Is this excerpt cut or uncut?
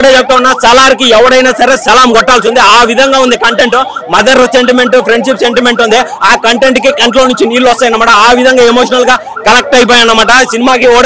uncut